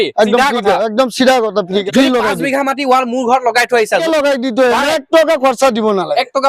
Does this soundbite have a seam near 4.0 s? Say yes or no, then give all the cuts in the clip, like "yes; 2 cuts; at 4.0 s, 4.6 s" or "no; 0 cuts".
yes; 2 cuts; at 1.8 s, 4.0 s